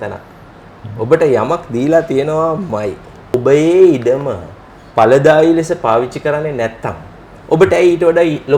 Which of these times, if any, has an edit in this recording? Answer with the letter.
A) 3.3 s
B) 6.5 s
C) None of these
A